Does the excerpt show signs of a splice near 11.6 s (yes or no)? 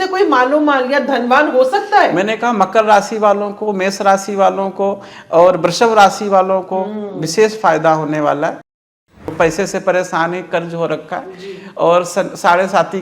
no